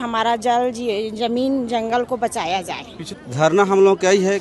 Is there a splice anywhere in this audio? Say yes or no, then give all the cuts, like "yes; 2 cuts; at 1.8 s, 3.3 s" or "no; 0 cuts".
yes; 1 cut; at 2.9 s